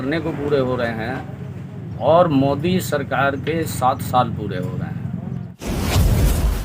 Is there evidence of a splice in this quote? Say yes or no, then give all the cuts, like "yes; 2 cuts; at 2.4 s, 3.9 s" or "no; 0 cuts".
yes; 1 cut; at 5.6 s